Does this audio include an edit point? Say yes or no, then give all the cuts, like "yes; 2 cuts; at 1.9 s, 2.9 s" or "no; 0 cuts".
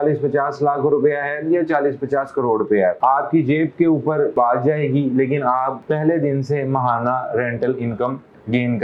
no; 0 cuts